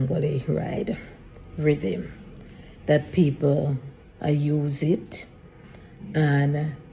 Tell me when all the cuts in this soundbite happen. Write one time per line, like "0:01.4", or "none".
none